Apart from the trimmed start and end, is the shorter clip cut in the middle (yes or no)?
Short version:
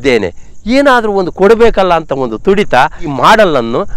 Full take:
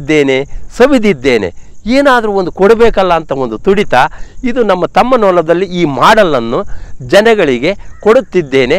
yes